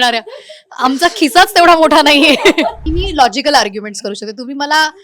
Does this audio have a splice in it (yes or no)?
yes